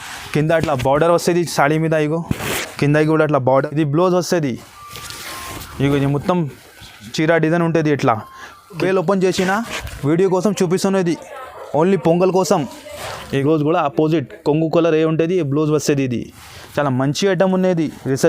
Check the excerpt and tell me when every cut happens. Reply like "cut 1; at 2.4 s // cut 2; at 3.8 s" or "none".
cut 1; at 3.5 s // cut 2; at 8.8 s // cut 3; at 13.2 s

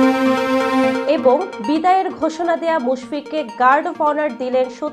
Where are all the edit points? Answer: cut 1; at 1.0 s

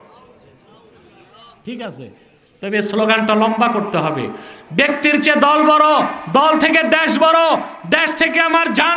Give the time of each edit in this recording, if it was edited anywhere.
none

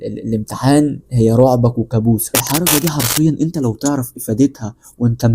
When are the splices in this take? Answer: cut 1; at 2.3 s

